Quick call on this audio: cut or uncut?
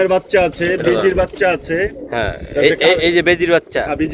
uncut